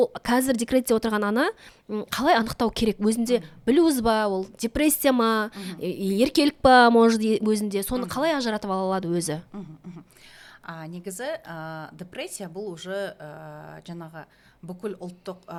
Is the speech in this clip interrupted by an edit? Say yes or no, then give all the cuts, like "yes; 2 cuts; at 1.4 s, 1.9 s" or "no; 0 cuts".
no; 0 cuts